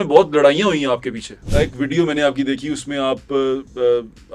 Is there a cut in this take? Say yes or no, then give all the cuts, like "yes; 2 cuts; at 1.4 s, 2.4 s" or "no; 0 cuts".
yes; 1 cut; at 1.3 s